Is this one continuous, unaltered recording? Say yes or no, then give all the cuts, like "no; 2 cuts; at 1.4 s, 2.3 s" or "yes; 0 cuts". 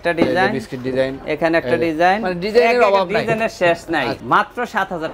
no; 1 cut; at 4.2 s